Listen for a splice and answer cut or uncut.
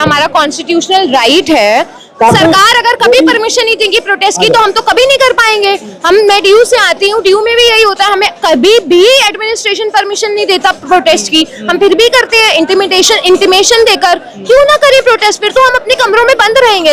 uncut